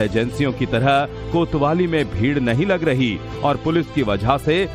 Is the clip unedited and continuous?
yes; 0 cuts

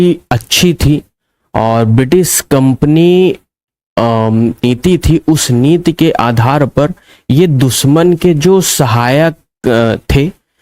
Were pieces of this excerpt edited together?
yes; 1 cut; at 4.6 s

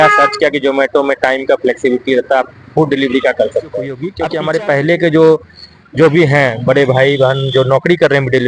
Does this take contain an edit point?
yes; 1 cut; at 4.1 s

